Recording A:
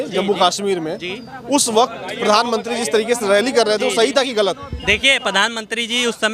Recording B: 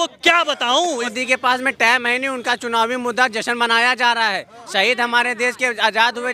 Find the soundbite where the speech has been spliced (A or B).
B